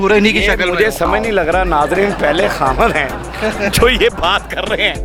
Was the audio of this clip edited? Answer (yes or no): no